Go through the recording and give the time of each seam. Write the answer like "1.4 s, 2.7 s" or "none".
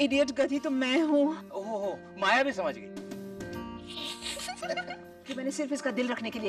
4.6 s